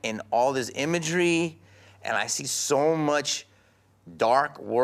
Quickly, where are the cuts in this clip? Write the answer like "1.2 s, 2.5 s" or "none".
none